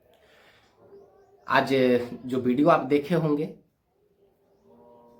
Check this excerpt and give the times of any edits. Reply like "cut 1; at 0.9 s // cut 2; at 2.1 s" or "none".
none